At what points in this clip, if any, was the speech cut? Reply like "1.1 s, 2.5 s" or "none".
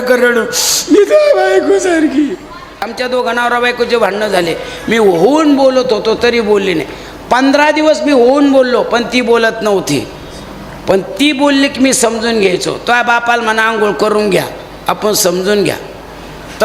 2.9 s